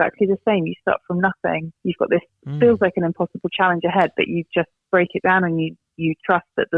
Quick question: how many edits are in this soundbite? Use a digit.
0